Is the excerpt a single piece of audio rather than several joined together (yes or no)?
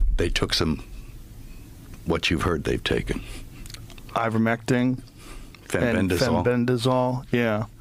yes